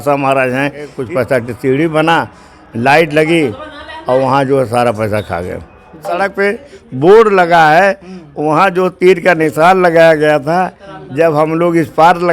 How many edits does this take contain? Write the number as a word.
two